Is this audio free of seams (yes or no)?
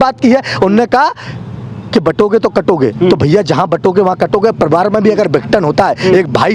yes